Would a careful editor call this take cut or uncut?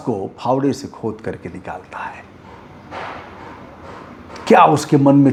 uncut